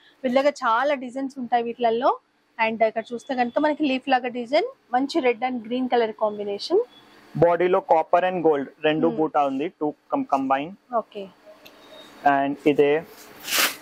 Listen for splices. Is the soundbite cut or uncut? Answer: uncut